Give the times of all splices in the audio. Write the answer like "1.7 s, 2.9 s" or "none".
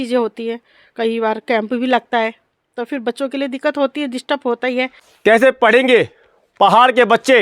5.0 s